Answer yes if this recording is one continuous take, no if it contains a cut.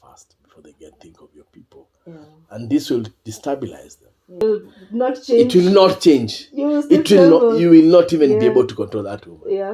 no